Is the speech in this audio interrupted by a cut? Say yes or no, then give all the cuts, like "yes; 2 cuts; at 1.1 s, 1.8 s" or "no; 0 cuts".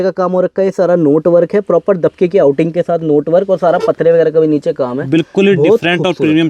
no; 0 cuts